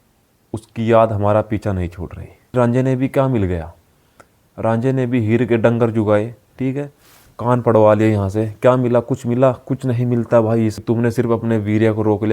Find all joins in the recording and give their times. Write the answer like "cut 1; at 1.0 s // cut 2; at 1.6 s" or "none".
cut 1; at 2.5 s // cut 2; at 10.7 s